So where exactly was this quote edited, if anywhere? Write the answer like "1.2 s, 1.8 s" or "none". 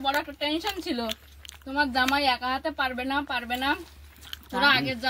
none